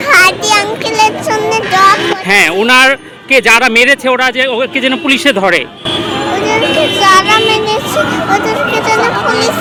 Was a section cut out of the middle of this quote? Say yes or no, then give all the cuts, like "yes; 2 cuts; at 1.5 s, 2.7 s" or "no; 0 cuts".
no; 0 cuts